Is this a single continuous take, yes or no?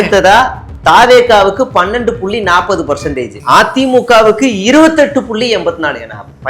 no